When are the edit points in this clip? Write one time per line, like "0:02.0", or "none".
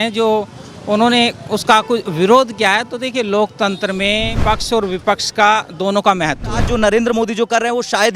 0:04.3
0:06.7